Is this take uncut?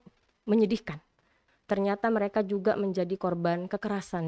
no; 1 cut; at 1.5 s

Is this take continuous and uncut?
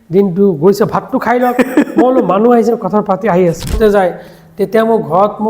no; 1 cut; at 3.8 s

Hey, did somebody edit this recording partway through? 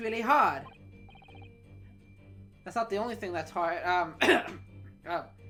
no; 0 cuts

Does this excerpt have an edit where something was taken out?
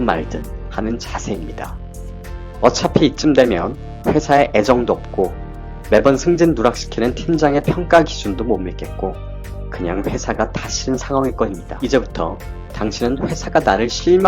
yes; 1 cut; at 11.6 s

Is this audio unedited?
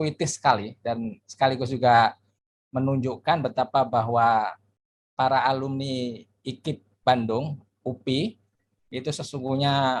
yes; 0 cuts

